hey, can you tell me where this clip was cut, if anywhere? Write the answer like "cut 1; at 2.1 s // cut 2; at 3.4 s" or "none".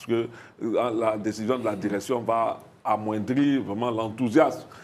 none